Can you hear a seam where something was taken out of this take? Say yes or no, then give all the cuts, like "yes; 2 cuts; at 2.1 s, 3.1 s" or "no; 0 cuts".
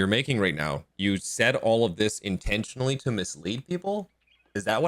no; 0 cuts